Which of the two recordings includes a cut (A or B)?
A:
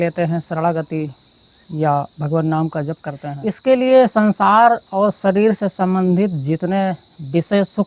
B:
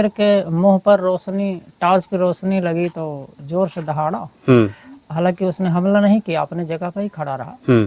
A